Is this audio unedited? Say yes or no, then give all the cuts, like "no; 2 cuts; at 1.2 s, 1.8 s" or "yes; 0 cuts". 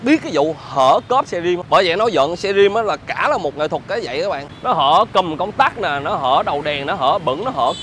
no; 2 cuts; at 1.6 s, 4.5 s